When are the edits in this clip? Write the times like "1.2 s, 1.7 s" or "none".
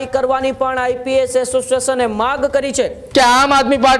3.0 s